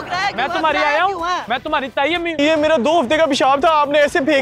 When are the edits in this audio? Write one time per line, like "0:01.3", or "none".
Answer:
0:02.4